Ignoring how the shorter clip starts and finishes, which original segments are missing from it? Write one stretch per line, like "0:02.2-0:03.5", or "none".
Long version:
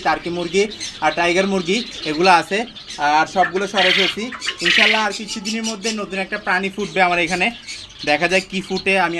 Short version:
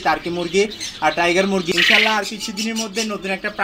0:01.7-0:04.6